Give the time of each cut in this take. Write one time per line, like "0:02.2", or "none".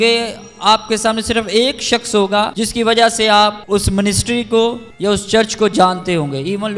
0:02.5
0:03.6
0:04.9